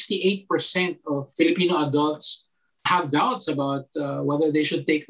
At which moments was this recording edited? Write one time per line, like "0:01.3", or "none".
none